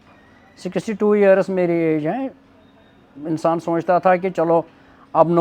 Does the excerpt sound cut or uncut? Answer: uncut